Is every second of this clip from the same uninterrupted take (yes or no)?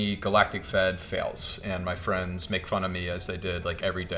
yes